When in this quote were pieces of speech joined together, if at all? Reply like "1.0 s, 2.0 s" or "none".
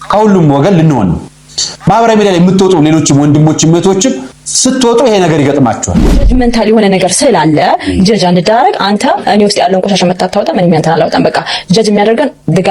6.2 s